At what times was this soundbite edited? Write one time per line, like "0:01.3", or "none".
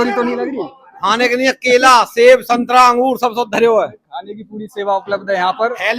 none